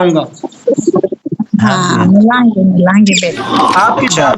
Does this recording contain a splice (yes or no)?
yes